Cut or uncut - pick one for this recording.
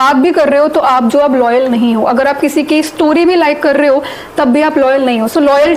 uncut